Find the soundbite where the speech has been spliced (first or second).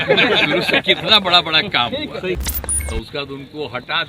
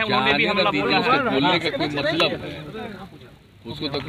first